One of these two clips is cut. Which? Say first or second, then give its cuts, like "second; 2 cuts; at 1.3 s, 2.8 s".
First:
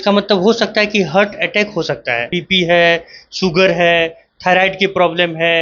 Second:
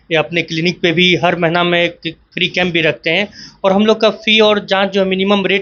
first; 1 cut; at 2.3 s